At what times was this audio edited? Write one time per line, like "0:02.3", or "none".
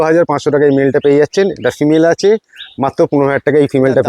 none